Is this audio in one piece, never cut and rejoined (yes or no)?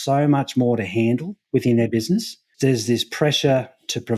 no